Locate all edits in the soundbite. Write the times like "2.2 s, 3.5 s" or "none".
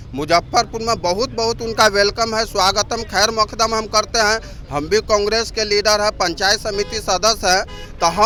none